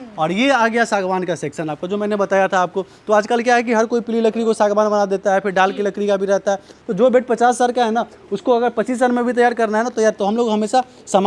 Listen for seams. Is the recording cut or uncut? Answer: uncut